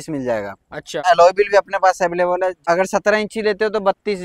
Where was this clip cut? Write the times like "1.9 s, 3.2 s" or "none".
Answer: 1.0 s, 2.6 s